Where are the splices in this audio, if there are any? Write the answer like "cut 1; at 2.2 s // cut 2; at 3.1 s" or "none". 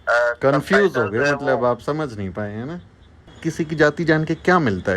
cut 1; at 3.4 s